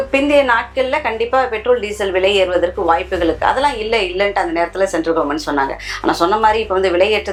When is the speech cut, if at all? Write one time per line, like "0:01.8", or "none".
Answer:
none